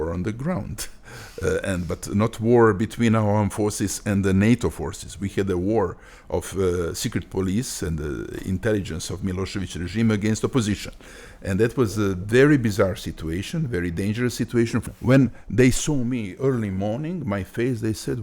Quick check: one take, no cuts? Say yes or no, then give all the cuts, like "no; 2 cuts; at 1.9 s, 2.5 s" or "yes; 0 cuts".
no; 1 cut; at 14.9 s